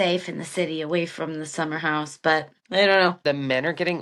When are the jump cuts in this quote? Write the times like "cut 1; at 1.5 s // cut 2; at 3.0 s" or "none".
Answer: cut 1; at 2.6 s // cut 2; at 3.2 s